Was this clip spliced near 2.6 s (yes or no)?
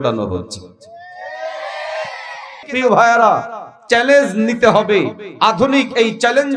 yes